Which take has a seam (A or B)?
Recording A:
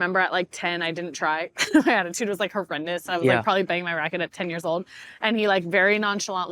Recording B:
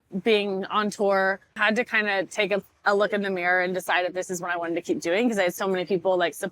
B